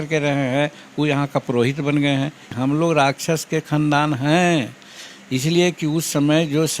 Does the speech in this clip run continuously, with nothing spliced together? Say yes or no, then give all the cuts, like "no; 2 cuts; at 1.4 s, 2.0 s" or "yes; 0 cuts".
no; 1 cut; at 2.5 s